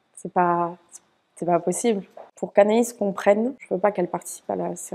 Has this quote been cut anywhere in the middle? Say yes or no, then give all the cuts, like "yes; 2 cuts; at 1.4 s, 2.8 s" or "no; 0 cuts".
no; 0 cuts